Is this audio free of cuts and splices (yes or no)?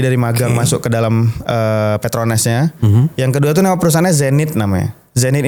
yes